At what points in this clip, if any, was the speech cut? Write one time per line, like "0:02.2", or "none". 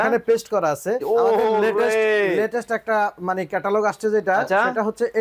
0:01.0